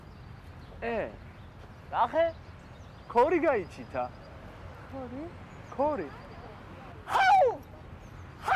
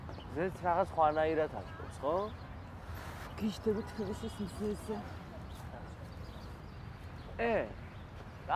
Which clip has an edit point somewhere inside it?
second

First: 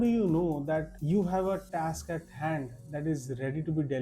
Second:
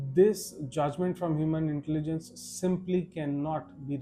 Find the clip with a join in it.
first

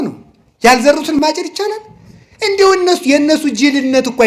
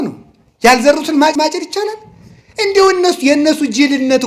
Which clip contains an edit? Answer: first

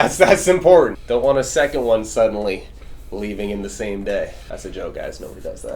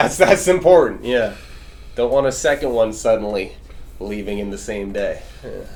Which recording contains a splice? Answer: first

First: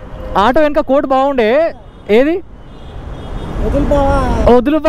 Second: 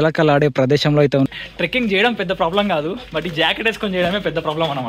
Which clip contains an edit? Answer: second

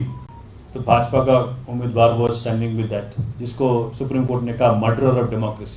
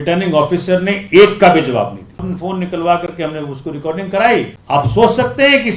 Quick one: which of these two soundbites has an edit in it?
second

